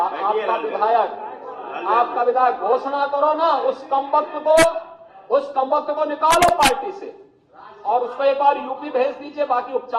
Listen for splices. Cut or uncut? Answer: uncut